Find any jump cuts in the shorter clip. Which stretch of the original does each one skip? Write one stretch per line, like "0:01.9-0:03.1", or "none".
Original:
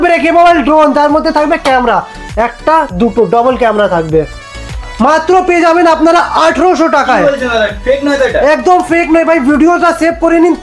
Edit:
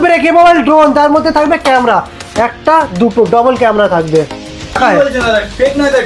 0:04.8-0:07.0